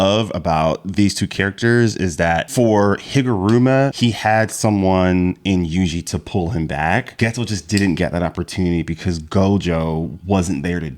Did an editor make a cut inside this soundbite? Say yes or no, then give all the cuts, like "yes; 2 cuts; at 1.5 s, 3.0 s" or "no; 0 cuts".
yes; 3 cuts; at 2.5 s, 3.9 s, 7.1 s